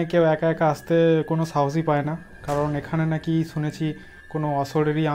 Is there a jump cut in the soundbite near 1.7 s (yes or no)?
no